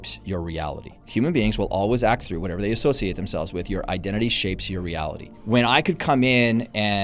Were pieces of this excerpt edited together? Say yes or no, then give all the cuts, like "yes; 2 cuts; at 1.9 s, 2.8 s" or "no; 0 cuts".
yes; 2 cuts; at 1.0 s, 5.3 s